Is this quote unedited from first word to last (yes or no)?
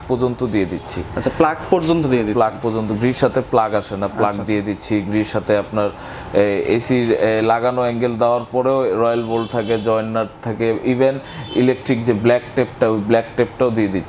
yes